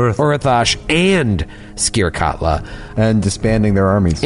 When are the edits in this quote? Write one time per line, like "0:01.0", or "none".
0:02.9